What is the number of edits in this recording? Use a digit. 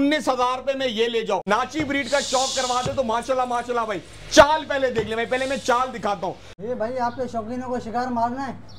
2